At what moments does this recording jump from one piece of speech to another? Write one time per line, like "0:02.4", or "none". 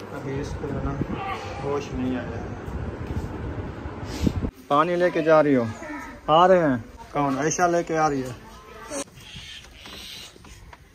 0:04.6
0:07.0
0:09.0